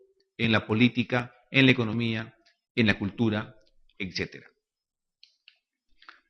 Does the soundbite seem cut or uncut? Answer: cut